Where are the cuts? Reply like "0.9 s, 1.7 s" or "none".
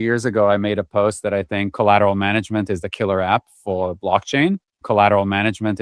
4.7 s